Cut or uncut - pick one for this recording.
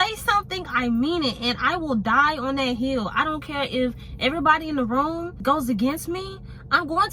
uncut